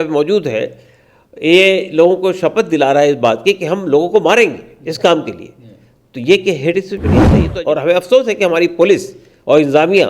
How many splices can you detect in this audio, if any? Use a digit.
1